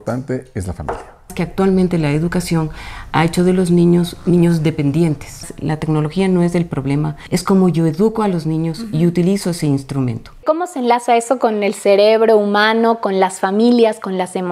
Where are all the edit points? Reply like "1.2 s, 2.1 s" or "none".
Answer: 1.3 s, 5.5 s, 7.2 s, 10.4 s